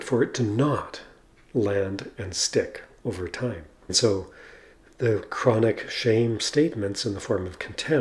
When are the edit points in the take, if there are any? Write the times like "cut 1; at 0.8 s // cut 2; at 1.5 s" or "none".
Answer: cut 1; at 3.9 s